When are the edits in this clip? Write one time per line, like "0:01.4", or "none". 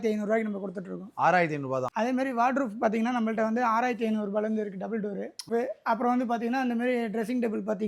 0:01.9
0:05.5